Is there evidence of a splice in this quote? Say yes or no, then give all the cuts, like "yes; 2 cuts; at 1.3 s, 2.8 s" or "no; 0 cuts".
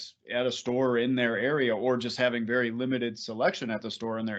no; 0 cuts